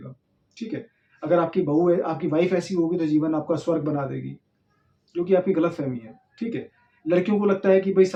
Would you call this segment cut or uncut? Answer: uncut